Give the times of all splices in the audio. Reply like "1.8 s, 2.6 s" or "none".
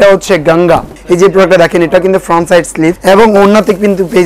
0.9 s, 3.0 s

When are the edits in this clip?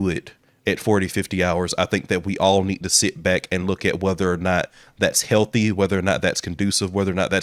none

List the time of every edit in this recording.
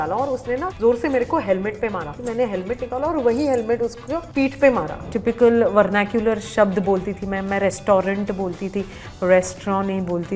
2.1 s, 5.0 s

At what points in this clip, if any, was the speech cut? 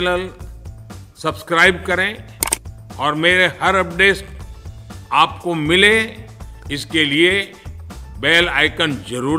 none

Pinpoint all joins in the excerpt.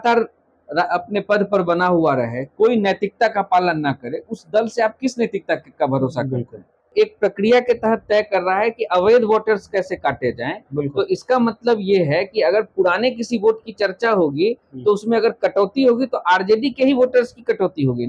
6.9 s

